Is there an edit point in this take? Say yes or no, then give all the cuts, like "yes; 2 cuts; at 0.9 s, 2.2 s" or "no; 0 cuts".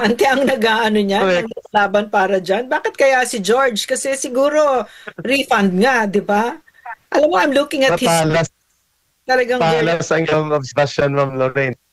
no; 0 cuts